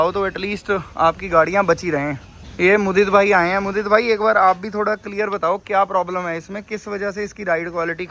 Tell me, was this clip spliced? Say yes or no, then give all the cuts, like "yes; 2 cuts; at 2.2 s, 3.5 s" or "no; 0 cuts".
no; 0 cuts